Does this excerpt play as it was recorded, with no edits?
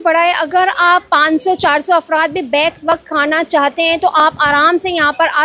yes; 0 cuts

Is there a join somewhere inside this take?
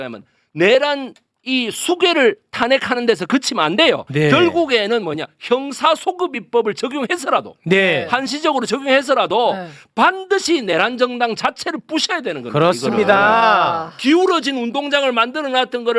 no; 0 cuts

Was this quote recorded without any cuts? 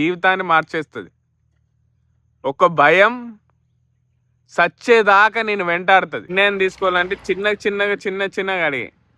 no; 1 cut; at 6.3 s

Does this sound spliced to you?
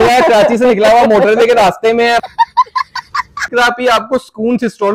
yes; 2 cuts; at 2.2 s, 3.5 s

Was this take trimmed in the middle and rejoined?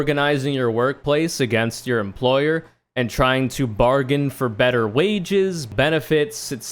yes; 1 cut; at 5.7 s

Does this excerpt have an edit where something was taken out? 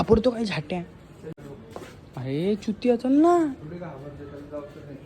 yes; 1 cut; at 1.3 s

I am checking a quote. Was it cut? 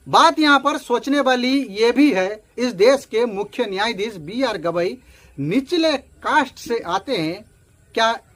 no; 0 cuts

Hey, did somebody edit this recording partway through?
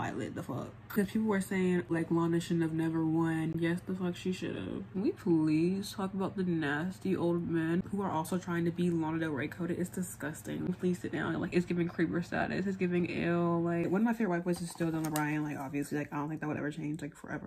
yes; 6 cuts; at 1.0 s, 1.9 s, 3.5 s, 4.9 s, 10.7 s, 13.9 s

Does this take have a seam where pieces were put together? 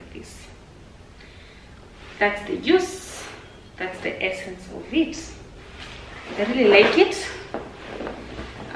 no; 0 cuts

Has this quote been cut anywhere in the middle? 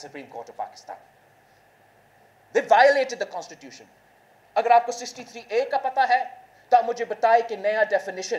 no; 0 cuts

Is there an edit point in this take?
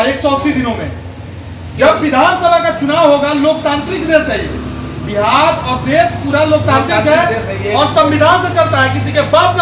no; 0 cuts

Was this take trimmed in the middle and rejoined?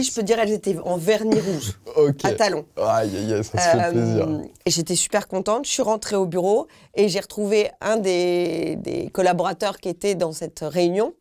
no; 0 cuts

